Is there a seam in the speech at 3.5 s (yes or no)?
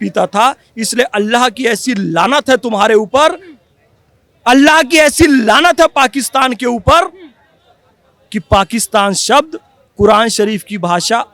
no